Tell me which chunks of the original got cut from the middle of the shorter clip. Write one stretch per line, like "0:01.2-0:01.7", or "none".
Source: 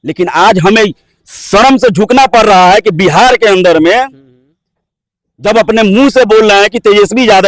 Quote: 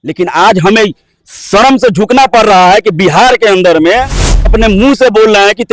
0:04.5-0:05.7